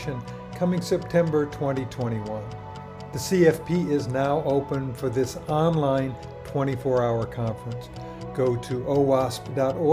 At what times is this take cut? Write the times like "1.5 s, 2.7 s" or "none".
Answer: none